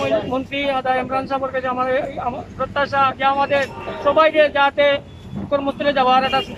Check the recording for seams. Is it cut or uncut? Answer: uncut